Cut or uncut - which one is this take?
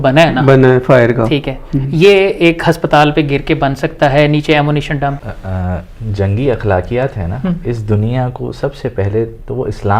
cut